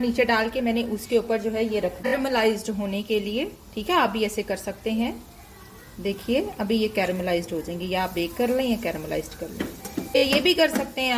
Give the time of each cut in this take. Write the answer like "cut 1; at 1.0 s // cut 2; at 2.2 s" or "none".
none